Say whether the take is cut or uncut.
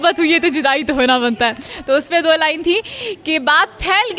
uncut